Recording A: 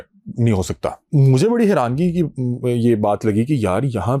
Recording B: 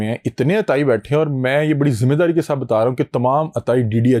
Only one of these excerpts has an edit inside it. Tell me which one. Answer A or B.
A